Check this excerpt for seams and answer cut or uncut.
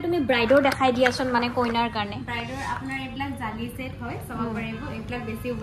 uncut